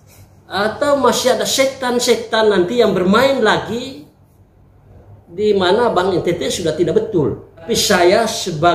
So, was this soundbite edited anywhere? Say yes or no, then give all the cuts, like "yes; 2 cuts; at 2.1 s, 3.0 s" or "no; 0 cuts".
yes; 1 cut; at 7.7 s